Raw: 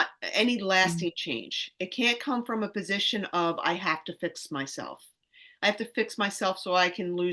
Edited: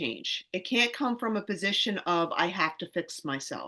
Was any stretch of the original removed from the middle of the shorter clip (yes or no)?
no